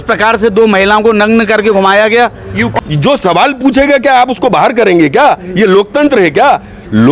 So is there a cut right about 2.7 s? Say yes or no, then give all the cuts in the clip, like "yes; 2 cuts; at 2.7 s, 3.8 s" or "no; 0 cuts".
yes; 1 cut; at 2.7 s